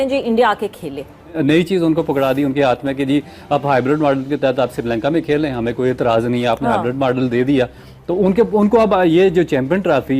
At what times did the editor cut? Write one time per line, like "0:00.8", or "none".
0:01.4

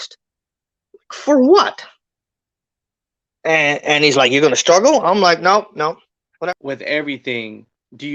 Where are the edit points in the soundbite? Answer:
0:06.3

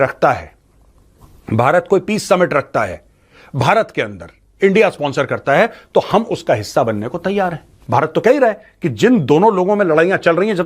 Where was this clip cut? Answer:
0:07.8

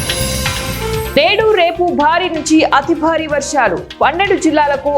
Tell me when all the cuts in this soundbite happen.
none

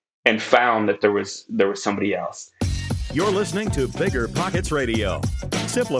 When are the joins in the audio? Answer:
0:02.4

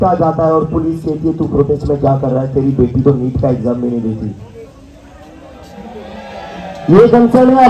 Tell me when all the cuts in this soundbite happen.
none

